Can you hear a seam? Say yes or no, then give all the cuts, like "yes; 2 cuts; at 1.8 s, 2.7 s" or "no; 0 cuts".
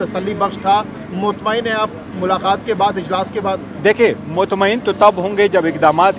no; 0 cuts